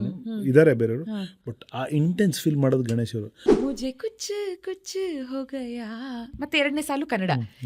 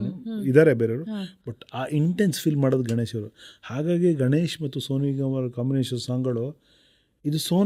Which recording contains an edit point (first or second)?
first